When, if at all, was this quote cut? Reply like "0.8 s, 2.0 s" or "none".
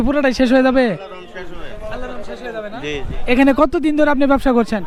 none